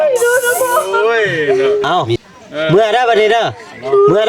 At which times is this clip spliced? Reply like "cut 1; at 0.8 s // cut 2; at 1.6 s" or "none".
cut 1; at 0.9 s